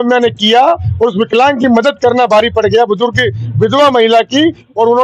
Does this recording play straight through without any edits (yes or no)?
yes